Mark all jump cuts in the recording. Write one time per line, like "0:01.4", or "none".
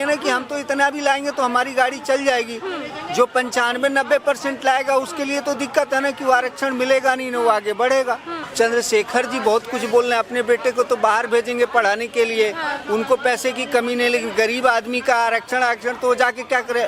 0:08.4